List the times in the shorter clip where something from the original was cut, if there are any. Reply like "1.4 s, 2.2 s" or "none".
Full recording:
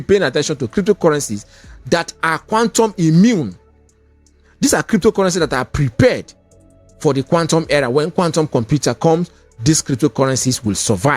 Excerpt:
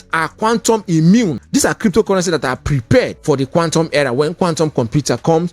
1.4 s, 3.2 s